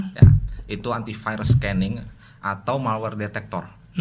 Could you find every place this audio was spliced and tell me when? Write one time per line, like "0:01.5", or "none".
none